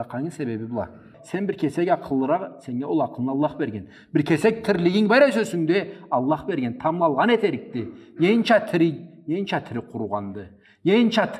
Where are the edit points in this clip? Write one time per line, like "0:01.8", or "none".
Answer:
0:01.2